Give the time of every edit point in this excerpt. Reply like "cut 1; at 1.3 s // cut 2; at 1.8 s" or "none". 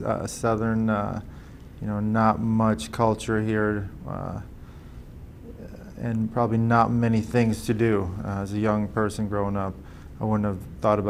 none